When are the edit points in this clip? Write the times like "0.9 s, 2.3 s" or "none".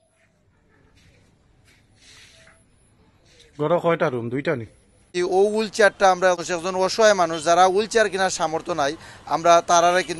5.0 s, 6.4 s